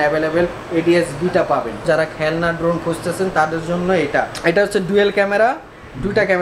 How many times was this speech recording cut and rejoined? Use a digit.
2